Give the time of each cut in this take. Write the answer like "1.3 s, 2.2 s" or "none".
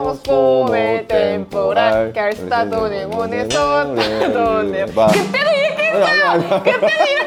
none